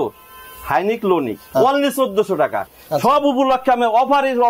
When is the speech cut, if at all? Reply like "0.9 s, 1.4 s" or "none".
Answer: 1.4 s, 2.7 s